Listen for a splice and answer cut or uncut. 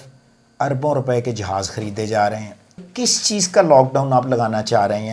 cut